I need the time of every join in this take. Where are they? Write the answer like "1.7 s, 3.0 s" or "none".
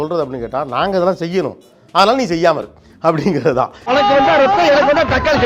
none

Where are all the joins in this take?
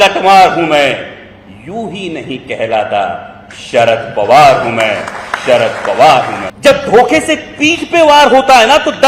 6.4 s

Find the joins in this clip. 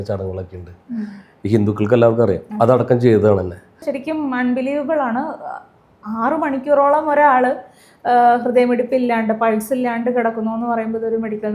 3.9 s

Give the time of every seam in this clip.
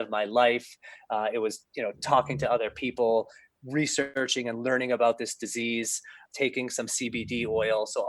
4.1 s, 6.3 s

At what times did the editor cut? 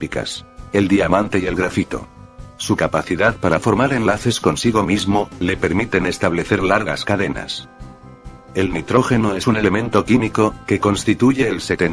4.4 s

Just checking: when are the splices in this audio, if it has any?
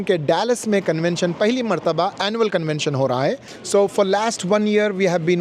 3.7 s

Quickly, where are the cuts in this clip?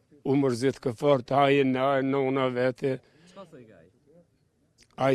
none

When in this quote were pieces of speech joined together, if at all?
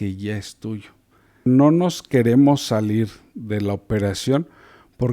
1.5 s

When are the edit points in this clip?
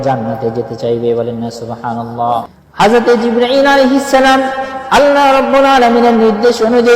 2.6 s

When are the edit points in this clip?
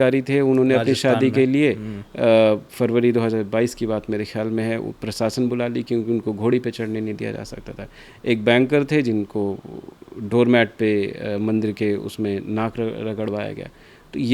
none

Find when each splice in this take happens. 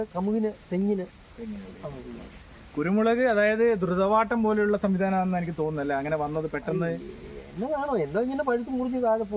none

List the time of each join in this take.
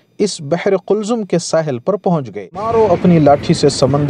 2.7 s

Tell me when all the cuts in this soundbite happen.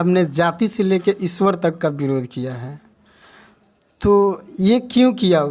none

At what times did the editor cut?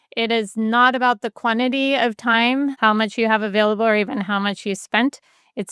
2.8 s

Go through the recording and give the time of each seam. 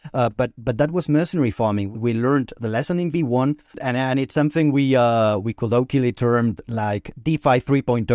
1.9 s, 3.8 s

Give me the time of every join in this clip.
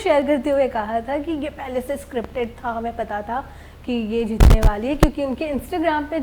none

